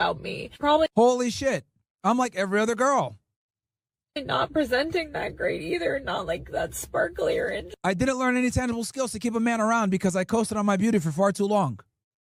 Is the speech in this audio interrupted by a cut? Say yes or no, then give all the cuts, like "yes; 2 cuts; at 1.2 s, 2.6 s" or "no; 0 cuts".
no; 0 cuts